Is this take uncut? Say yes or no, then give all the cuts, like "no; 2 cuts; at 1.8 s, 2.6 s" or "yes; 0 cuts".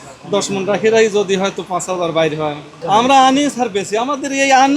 no; 1 cut; at 2.7 s